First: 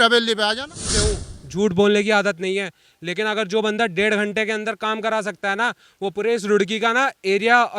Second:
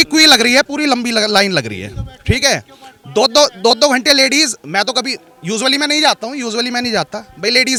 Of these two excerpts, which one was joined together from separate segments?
first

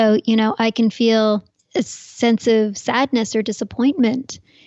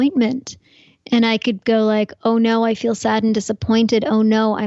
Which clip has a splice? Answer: first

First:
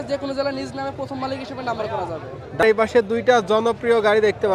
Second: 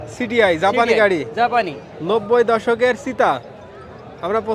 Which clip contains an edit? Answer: first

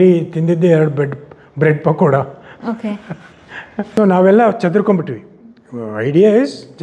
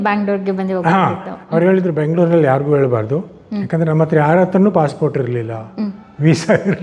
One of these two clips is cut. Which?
first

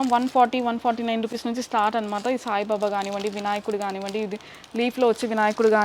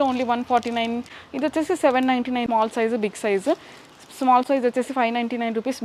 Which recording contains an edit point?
second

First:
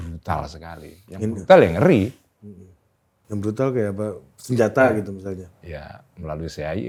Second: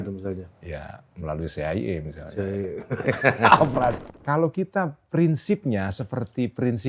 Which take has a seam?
second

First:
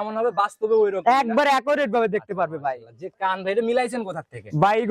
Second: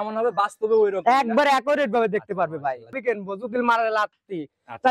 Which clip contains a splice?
second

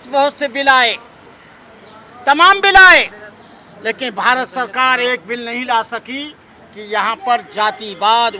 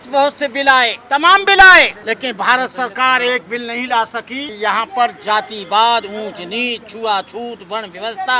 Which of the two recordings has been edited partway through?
second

